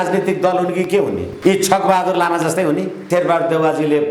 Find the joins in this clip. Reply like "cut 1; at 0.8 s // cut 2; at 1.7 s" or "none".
cut 1; at 3.0 s